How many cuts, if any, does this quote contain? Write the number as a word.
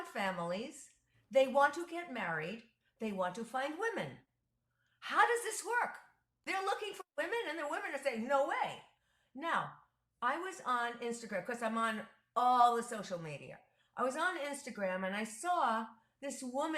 one